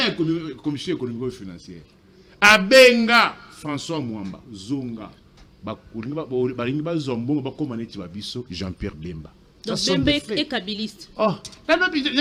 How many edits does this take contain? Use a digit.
0